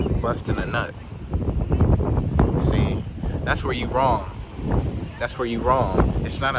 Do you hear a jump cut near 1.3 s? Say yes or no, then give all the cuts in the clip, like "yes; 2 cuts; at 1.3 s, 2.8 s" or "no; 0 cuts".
no; 0 cuts